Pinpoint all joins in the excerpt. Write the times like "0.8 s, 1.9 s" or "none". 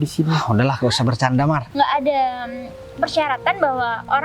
1.6 s